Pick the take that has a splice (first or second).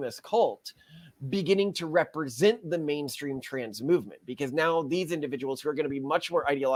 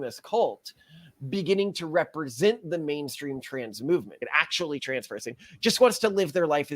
second